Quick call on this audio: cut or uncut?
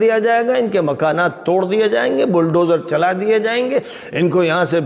uncut